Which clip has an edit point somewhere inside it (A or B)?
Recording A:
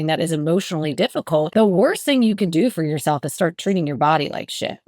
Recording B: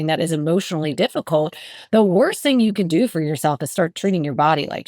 A